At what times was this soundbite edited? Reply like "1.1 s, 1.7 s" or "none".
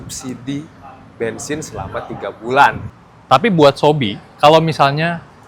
2.8 s